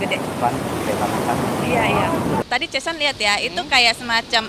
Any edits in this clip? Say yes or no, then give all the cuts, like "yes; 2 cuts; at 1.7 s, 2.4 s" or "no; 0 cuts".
yes; 1 cut; at 2.4 s